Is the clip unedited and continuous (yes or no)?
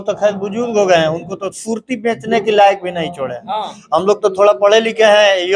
yes